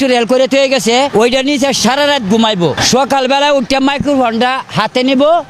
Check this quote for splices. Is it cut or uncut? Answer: uncut